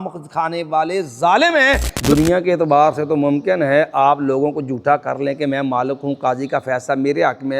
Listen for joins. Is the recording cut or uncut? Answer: cut